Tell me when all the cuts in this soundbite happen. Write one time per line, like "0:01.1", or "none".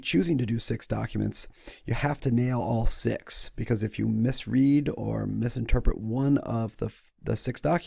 none